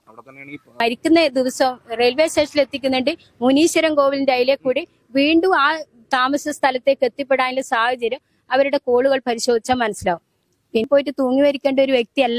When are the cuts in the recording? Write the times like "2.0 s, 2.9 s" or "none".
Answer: 0.8 s, 10.9 s